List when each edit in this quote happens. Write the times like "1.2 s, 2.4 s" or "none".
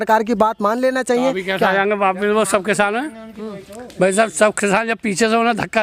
none